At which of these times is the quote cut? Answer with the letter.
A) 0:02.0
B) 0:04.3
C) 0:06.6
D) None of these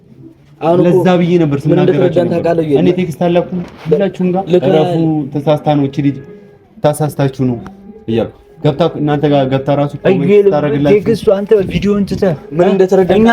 D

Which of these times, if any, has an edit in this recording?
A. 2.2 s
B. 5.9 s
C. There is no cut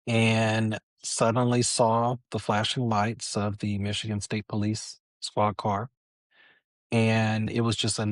C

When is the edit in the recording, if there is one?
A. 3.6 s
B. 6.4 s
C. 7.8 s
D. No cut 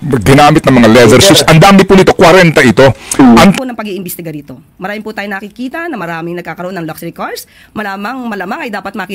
A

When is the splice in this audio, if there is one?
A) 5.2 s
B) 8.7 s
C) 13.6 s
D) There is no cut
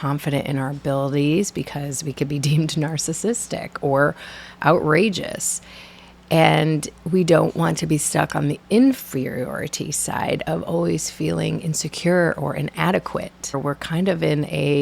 C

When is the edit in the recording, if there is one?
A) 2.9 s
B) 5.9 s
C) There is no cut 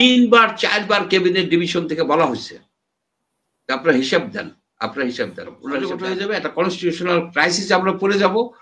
B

